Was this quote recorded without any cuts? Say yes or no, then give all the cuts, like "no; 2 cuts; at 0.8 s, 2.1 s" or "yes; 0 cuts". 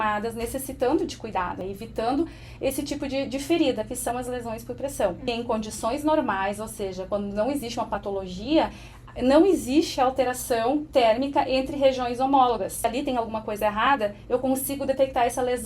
no; 3 cuts; at 1.6 s, 5.2 s, 12.9 s